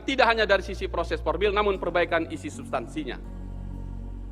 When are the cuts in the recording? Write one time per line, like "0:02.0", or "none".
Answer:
0:03.4